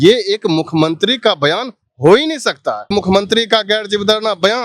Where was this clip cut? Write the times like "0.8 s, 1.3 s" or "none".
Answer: 2.9 s